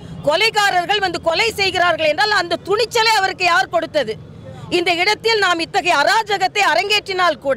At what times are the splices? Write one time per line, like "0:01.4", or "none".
none